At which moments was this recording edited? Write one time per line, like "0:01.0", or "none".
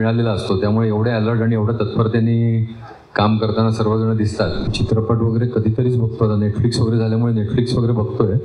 0:04.6